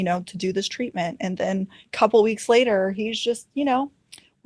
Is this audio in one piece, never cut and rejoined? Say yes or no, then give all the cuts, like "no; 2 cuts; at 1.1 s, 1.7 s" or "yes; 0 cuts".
no; 1 cut; at 1.8 s